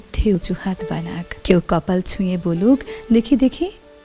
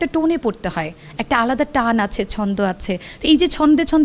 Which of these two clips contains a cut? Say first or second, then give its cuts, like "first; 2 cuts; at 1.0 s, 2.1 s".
first; 1 cut; at 1.3 s